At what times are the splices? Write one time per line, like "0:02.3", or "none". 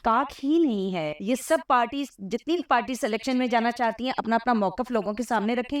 0:01.1